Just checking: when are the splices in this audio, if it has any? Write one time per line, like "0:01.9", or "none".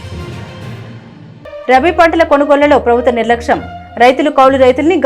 0:01.0